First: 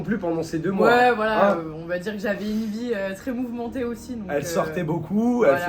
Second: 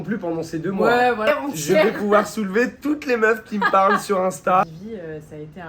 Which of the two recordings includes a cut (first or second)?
second